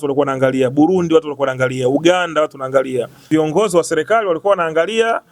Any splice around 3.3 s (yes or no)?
yes